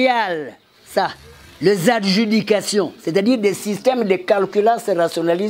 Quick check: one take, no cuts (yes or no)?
yes